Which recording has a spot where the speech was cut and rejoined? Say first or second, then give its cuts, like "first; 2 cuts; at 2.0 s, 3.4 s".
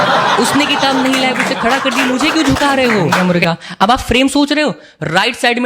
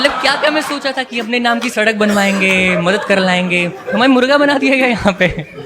first; 1 cut; at 3.5 s